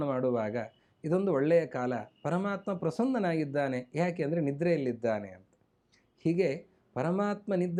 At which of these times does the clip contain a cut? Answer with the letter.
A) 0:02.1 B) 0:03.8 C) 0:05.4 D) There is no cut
D